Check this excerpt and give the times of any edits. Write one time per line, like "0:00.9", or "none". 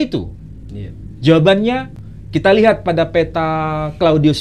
0:02.0